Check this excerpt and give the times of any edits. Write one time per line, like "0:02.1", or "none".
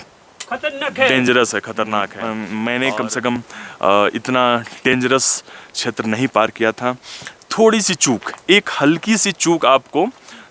0:02.2